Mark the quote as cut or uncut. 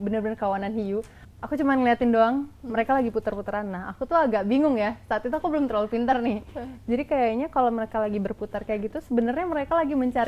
cut